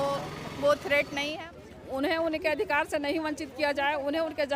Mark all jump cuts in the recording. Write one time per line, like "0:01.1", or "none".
0:01.4